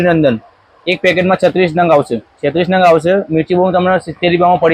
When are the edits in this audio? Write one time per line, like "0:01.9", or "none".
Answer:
none